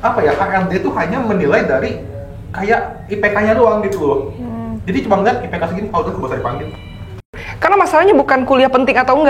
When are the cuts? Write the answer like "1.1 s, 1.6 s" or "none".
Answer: 7.4 s